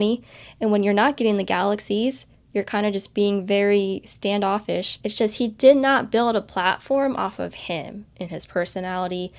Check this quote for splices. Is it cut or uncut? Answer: cut